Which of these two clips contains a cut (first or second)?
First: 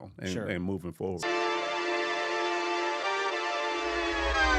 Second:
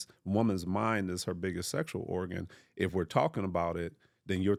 first